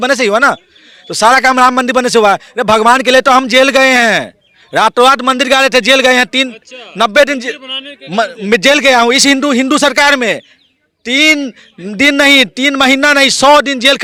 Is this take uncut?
yes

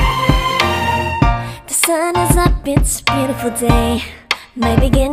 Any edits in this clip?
no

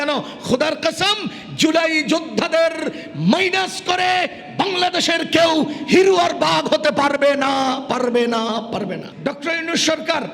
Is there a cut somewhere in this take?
yes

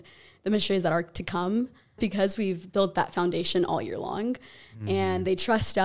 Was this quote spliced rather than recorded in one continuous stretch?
yes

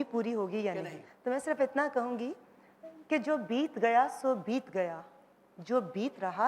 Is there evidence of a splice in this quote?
no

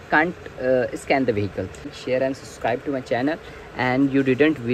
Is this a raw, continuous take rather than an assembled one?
no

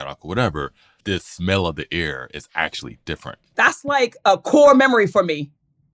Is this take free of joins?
yes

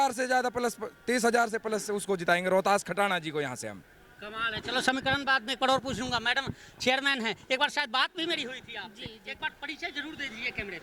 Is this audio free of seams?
yes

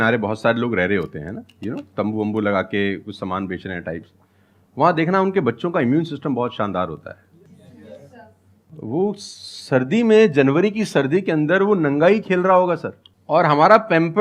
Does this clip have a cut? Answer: no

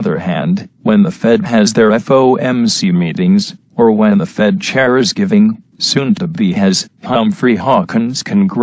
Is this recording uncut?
no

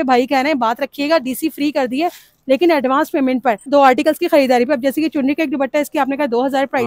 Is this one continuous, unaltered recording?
yes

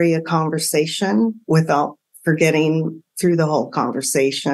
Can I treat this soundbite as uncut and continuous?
yes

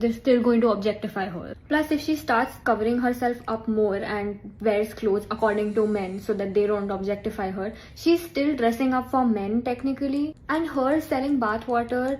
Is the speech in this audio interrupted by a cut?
yes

